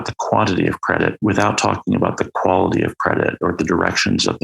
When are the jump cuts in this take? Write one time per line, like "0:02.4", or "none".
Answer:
0:01.2
0:03.5